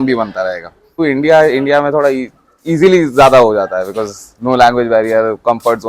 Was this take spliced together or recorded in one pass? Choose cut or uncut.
cut